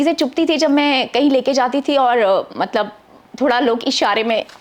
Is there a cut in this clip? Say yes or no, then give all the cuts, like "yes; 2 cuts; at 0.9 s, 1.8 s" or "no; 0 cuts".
no; 0 cuts